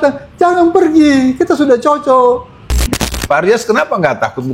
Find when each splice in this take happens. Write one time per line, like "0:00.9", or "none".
0:02.9